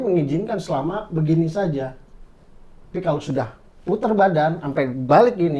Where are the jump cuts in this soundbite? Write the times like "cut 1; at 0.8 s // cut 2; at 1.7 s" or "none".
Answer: none

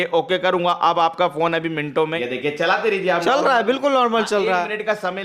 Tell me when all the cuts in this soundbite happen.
cut 1; at 2.2 s

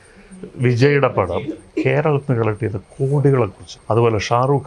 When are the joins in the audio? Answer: cut 1; at 3.7 s

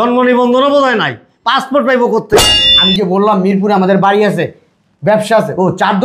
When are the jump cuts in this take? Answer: cut 1; at 2.5 s

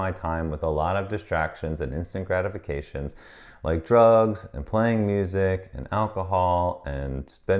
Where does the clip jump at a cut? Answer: none

